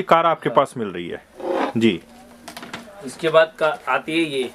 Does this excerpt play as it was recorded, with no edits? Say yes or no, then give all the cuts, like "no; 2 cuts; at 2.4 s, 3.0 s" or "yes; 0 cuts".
yes; 0 cuts